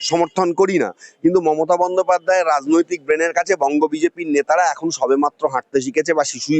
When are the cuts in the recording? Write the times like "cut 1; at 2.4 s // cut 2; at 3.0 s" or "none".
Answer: none